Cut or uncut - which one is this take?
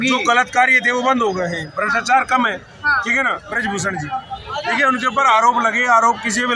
cut